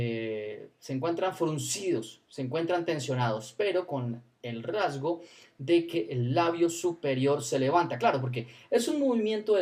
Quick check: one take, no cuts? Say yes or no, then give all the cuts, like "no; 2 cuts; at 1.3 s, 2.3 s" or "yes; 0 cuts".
yes; 0 cuts